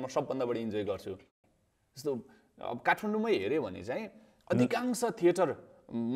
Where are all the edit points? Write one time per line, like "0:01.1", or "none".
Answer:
0:01.2